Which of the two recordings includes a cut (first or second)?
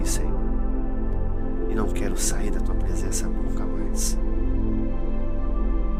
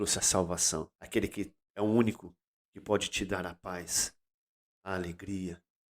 second